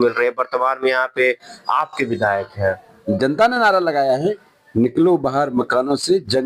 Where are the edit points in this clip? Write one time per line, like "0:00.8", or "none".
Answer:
0:02.9